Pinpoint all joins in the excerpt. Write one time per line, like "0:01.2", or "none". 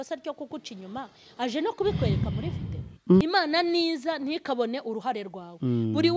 0:03.2